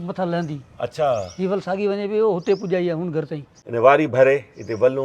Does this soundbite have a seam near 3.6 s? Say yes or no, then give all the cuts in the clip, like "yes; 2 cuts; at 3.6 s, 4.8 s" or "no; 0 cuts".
yes; 1 cut; at 3.6 s